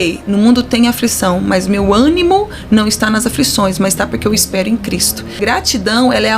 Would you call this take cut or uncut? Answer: cut